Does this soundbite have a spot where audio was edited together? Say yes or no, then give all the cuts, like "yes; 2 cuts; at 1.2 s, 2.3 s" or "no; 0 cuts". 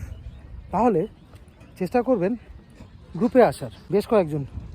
yes; 1 cut; at 3.7 s